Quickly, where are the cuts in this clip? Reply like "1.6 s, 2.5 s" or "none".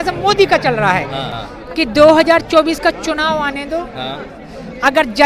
1.3 s